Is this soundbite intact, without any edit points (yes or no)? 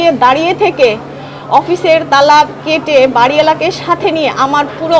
yes